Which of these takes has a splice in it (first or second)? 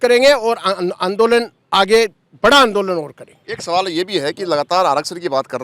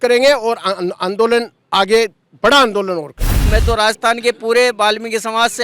second